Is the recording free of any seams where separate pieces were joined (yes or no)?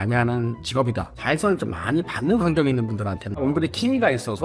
no